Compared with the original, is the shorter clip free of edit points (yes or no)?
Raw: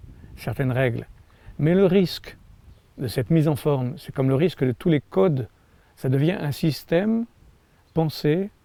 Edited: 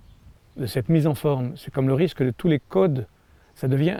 yes